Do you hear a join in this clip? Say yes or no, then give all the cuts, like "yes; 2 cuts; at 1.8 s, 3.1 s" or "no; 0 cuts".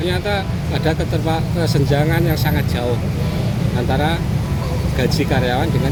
no; 0 cuts